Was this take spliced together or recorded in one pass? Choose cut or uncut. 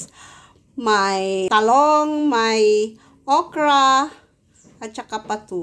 cut